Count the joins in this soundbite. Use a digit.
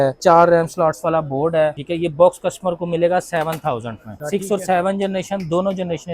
0